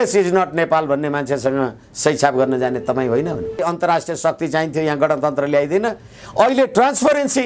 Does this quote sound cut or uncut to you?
cut